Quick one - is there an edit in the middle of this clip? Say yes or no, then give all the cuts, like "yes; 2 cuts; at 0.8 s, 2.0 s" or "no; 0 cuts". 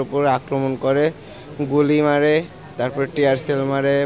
no; 0 cuts